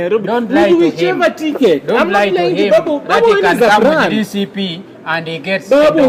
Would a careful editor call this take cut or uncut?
uncut